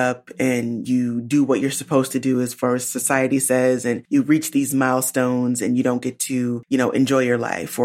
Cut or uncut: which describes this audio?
cut